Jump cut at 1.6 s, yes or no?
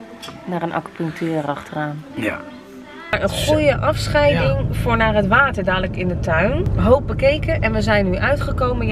no